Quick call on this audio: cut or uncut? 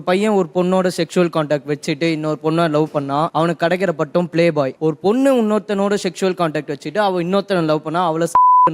cut